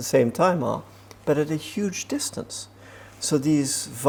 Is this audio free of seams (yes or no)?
yes